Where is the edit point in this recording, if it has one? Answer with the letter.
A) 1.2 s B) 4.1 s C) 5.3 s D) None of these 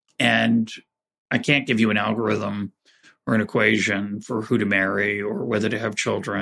A